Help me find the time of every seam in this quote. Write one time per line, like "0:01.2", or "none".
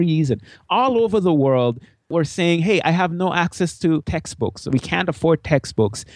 0:02.1
0:04.1